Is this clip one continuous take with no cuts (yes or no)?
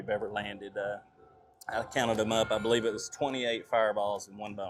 yes